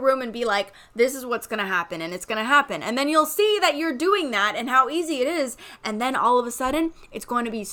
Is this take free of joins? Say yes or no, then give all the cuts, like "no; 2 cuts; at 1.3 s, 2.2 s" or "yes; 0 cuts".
yes; 0 cuts